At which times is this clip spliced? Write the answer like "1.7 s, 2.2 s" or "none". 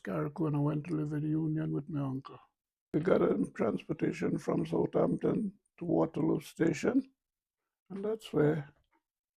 2.8 s